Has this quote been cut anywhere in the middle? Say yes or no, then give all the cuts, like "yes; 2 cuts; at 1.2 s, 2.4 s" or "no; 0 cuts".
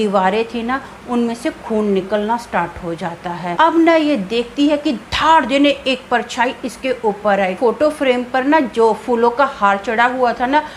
yes; 2 cuts; at 3.5 s, 7.6 s